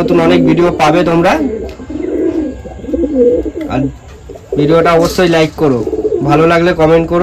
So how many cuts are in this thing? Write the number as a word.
zero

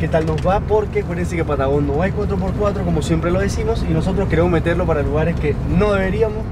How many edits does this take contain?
zero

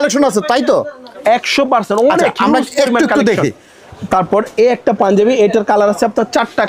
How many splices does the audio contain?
zero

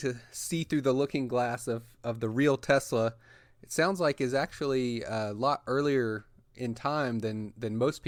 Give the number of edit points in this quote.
zero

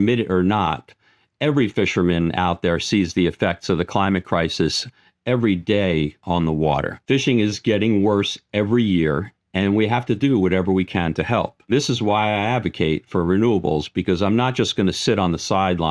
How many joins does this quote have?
two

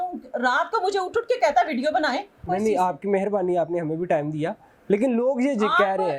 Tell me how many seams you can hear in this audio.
one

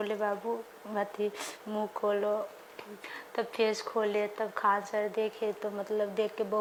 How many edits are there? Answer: zero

